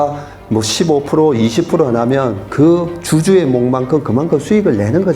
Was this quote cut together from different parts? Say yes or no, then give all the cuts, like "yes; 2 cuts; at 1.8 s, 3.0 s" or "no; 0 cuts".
no; 0 cuts